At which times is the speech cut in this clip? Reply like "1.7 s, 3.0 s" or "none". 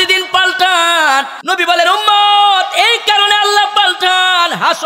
1.4 s